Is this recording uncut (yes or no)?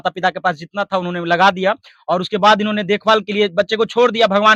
yes